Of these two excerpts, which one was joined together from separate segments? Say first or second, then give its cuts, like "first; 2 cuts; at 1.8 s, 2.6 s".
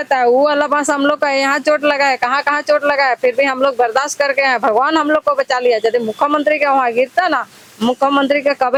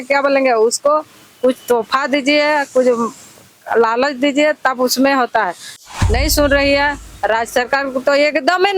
second; 1 cut; at 5.7 s